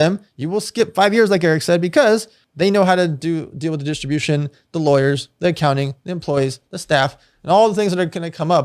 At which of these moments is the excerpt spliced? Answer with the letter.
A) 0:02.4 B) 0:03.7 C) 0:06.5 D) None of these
A